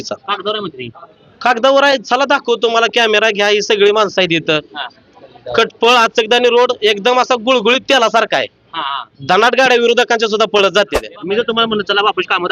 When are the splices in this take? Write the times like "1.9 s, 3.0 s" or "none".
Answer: 11.1 s